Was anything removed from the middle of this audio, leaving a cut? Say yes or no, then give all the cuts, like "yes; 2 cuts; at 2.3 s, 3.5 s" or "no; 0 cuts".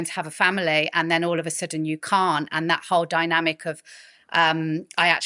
no; 0 cuts